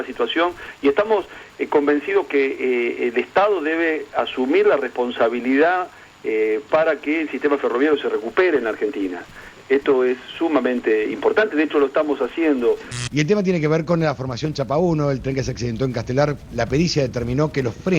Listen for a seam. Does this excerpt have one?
yes; 2 cuts; at 12.9 s, 16.4 s

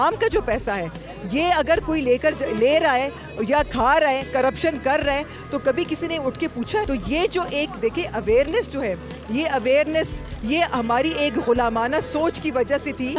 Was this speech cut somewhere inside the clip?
no; 0 cuts

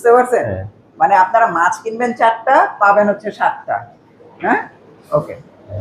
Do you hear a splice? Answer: no; 0 cuts

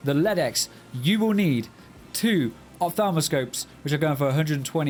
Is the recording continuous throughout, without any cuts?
yes; 0 cuts

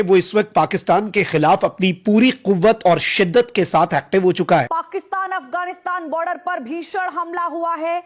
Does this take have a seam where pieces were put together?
yes; 1 cut; at 4.7 s

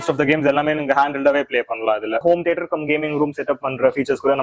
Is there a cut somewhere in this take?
yes; 1 cut; at 2.2 s

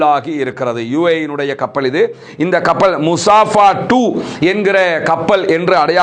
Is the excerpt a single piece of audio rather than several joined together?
yes; 0 cuts

